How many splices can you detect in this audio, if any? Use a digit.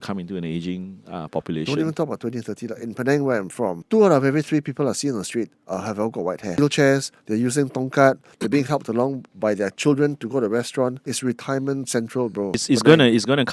4